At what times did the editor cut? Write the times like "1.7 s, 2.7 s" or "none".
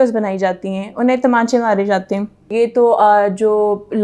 2.5 s